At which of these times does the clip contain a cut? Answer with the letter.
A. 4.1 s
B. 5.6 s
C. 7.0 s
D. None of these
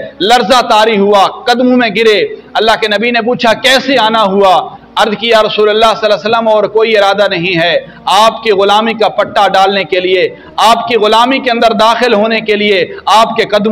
D